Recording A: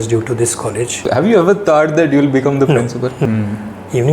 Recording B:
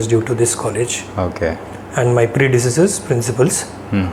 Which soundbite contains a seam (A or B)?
A